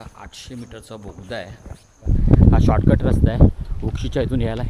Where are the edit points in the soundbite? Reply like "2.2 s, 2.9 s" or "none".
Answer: 2.1 s

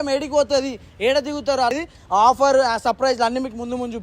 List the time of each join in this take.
1.7 s

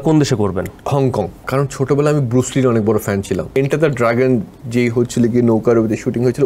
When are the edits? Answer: 1.3 s, 3.6 s

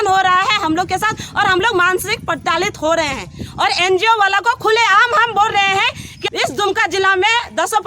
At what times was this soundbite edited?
6.1 s

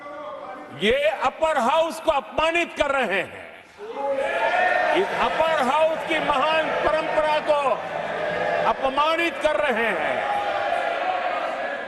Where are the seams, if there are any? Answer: none

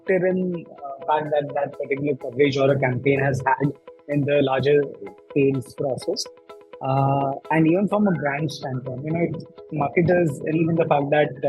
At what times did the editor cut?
1.0 s, 10.6 s

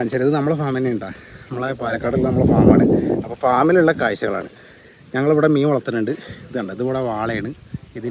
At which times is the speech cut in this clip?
none

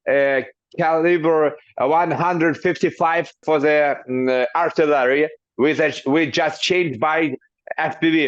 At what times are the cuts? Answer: none

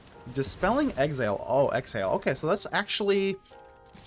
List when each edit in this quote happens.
none

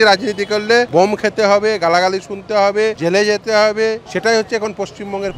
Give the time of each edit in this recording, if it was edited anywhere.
0.9 s, 3.0 s, 4.0 s

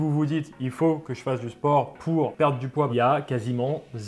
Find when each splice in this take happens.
2.9 s

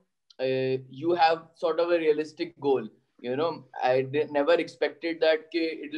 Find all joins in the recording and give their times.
none

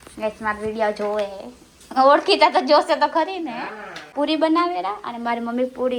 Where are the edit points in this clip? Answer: 4.0 s

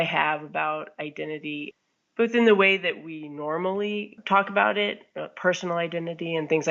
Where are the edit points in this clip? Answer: 1.7 s, 4.2 s

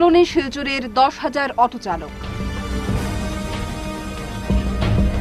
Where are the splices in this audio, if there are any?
none

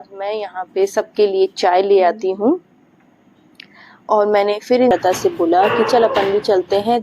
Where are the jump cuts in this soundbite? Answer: 4.9 s

